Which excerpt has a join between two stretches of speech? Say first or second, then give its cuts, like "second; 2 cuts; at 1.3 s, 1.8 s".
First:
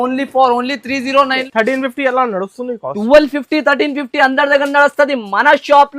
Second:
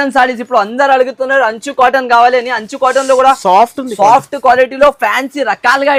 first; 1 cut; at 1.4 s